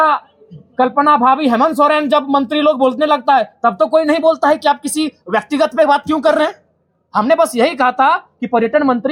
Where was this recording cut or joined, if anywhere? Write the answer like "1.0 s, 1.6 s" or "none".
none